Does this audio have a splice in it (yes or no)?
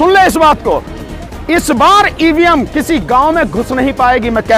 no